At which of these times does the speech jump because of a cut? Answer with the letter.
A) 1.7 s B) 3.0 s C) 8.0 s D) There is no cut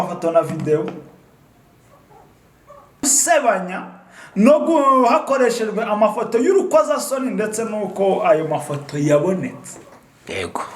B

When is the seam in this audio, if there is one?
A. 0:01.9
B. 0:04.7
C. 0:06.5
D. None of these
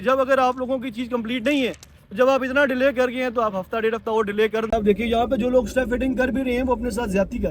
B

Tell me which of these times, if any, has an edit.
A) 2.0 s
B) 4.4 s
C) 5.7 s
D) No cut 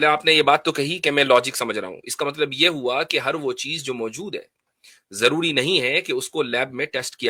D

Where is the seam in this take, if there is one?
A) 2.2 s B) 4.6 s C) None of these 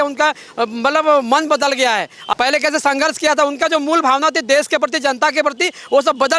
A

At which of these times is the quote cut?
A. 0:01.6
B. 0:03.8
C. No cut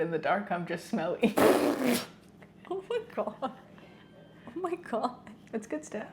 C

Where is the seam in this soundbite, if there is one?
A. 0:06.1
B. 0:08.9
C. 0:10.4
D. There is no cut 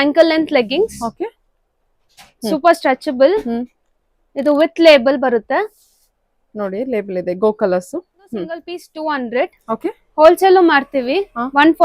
B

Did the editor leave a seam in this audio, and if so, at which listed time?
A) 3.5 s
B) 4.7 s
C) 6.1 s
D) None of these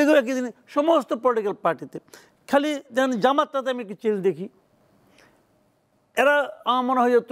D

